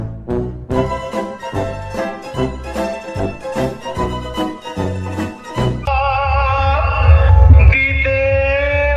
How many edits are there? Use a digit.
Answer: 1